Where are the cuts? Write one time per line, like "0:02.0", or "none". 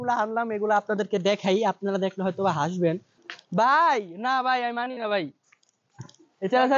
0:03.1